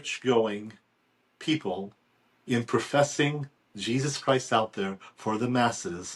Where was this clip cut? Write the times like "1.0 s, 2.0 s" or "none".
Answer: none

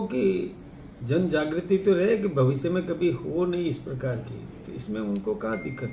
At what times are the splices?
none

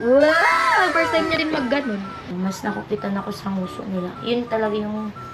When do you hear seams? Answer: 2.3 s

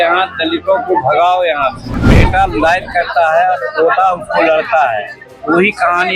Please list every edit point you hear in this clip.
2.0 s

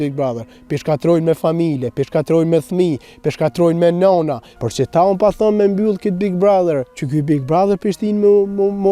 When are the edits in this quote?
4.5 s, 7.0 s

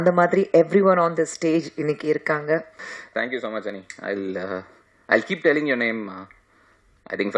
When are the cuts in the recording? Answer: 2.9 s

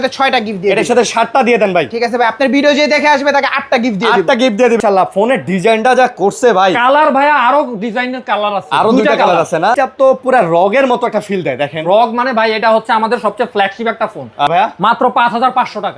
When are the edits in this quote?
4.8 s, 9.8 s, 14.5 s

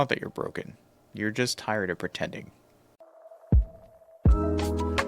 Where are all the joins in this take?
2.8 s

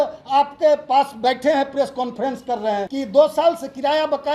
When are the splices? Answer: 2.9 s

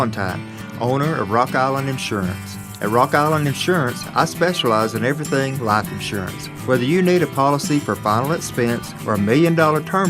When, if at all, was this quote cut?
none

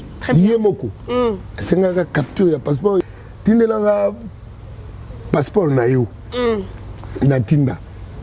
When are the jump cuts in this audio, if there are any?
3.0 s

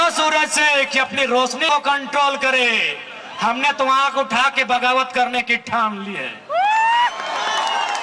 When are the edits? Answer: 1.6 s

